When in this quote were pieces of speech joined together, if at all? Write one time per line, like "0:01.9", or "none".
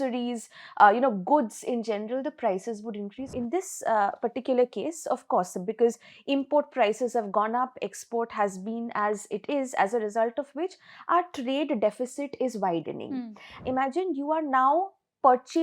0:03.3
0:13.6